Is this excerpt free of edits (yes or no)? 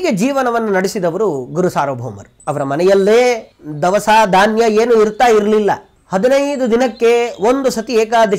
no